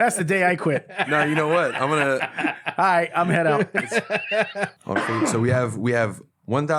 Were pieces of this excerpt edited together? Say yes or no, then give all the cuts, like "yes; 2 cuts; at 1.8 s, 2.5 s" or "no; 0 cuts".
yes; 1 cut; at 4.7 s